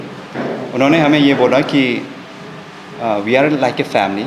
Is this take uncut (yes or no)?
yes